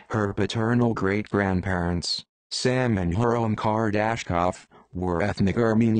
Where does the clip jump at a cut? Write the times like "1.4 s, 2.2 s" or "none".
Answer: none